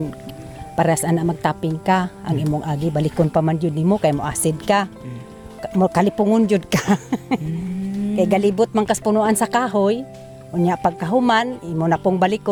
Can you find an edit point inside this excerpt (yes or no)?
no